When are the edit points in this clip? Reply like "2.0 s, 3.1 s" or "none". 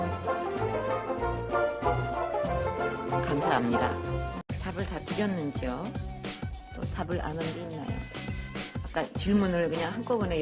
8.0 s